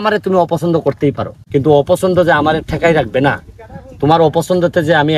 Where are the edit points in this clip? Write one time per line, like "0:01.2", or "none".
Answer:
0:01.3